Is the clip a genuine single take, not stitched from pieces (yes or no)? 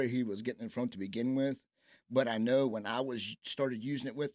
yes